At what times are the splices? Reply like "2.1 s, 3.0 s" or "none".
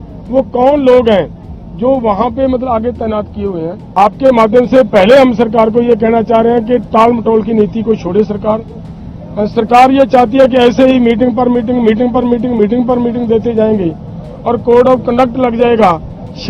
3.8 s